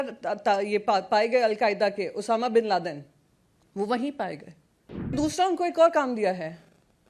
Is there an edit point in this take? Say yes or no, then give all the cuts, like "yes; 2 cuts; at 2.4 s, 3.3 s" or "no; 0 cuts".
yes; 1 cut; at 5.1 s